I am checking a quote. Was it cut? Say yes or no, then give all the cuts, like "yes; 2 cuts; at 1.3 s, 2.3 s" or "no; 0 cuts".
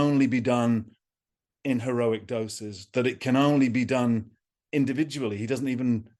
no; 0 cuts